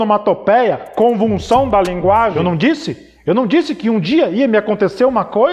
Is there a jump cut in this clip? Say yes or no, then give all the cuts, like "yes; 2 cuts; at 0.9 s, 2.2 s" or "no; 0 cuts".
yes; 1 cut; at 2.4 s